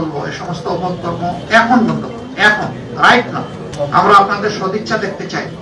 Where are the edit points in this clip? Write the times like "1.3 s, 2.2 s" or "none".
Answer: none